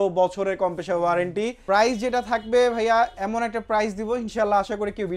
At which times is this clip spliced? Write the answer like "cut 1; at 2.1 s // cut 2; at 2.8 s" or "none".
cut 1; at 1.6 s